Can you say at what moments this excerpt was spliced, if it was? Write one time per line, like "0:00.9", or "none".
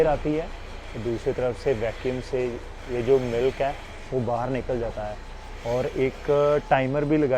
none